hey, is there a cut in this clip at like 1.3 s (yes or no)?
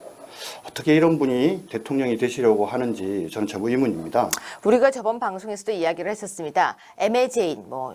no